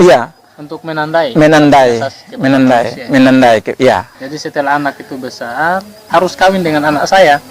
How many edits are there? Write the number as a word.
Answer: one